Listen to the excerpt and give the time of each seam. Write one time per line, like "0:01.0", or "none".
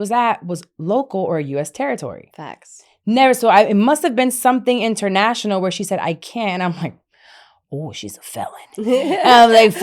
none